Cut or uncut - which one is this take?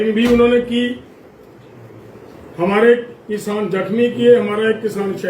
uncut